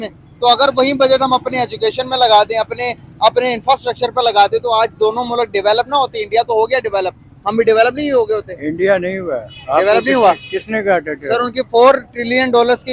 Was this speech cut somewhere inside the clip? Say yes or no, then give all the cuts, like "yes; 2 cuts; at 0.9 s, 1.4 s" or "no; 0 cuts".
no; 0 cuts